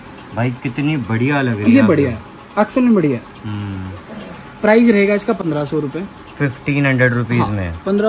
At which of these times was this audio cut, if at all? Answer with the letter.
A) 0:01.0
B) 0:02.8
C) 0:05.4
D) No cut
D